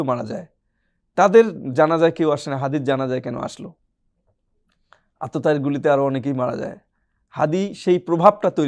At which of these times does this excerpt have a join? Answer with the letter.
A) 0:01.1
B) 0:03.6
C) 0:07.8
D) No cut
D